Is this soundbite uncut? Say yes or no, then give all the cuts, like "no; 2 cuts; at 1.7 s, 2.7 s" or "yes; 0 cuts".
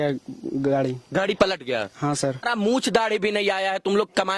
no; 1 cut; at 2.4 s